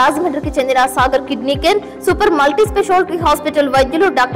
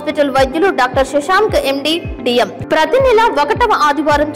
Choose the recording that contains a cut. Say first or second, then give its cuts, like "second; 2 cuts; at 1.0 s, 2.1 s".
second; 1 cut; at 2.6 s